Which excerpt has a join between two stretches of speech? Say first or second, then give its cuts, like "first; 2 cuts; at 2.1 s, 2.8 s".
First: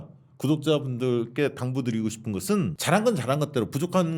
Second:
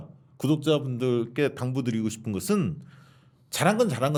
first; 1 cut; at 2.8 s